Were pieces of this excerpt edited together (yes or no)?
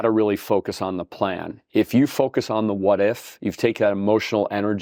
no